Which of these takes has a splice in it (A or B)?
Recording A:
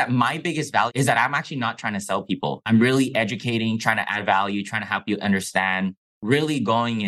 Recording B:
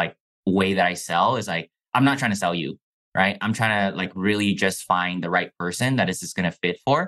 A